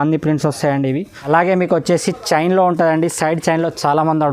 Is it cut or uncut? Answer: cut